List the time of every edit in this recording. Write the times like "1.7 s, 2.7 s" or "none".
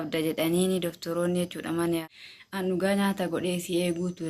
2.0 s